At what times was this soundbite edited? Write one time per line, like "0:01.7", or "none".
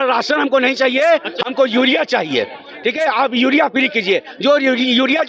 none

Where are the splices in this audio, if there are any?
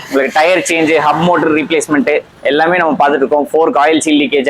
none

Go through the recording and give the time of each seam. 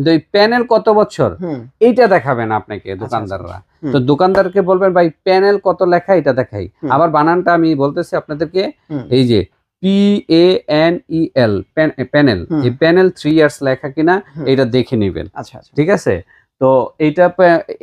none

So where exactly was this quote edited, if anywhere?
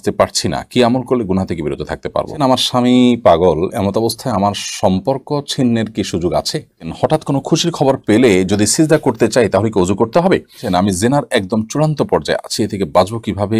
0:02.3
0:06.9
0:10.6

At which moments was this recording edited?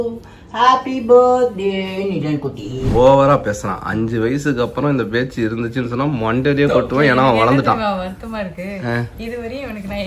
0:02.8

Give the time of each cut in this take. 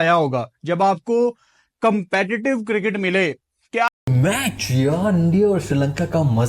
0:03.9

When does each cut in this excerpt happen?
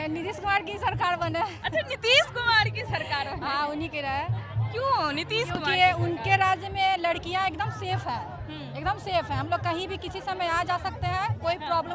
none

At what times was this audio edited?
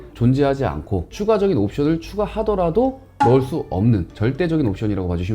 none

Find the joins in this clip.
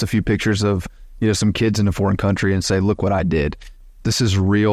0:03.7

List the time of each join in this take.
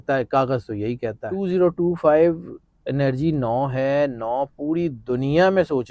0:01.4

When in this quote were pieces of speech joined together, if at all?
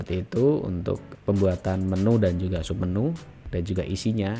0:01.1

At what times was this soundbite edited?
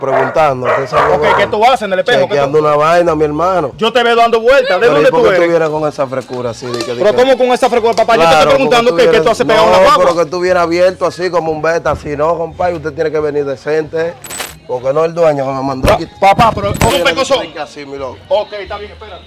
0:14.4
0:16.9

